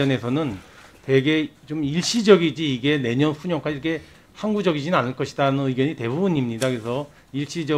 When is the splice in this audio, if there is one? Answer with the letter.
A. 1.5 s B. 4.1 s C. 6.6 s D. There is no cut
D